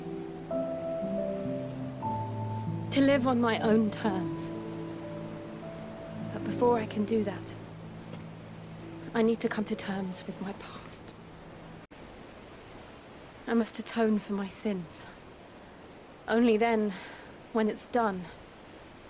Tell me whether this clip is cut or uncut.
cut